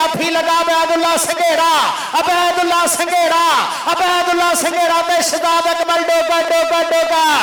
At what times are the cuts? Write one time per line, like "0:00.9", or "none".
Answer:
none